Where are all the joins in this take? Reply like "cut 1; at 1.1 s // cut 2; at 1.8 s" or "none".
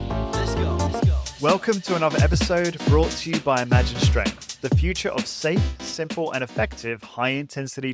cut 1; at 1.2 s